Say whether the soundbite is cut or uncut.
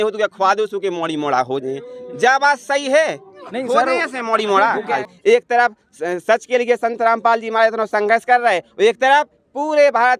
cut